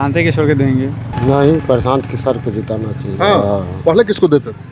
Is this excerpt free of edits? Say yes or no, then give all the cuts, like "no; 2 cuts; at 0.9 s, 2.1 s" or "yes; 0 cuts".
no; 1 cut; at 1.1 s